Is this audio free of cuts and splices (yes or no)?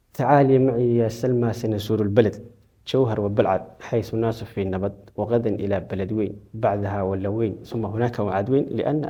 yes